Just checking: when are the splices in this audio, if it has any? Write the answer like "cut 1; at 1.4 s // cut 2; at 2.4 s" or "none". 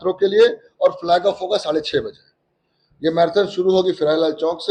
none